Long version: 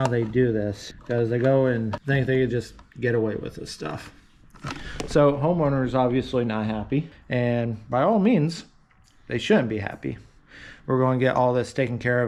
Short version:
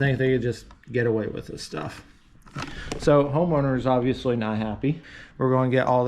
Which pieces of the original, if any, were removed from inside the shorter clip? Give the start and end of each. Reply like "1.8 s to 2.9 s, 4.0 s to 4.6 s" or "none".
7.2 s to 10.6 s